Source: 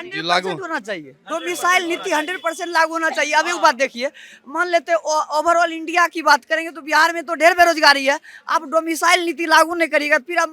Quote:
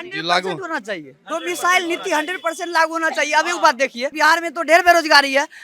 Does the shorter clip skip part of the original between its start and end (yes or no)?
yes